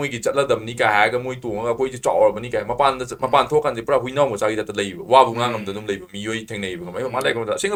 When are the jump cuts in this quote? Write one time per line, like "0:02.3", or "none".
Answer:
none